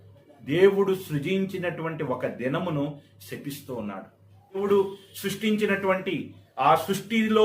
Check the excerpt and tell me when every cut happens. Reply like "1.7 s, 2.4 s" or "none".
4.6 s